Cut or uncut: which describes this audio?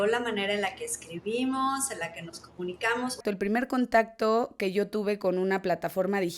cut